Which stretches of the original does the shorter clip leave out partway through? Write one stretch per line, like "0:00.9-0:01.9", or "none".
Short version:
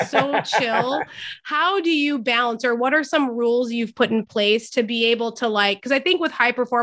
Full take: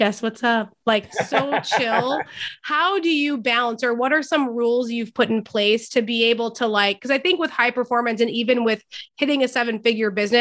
none